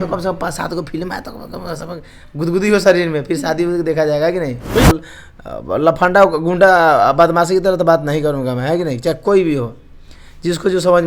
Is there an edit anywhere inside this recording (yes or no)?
yes